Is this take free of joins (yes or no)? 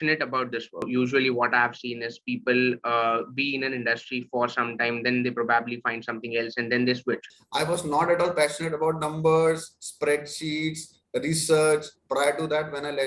no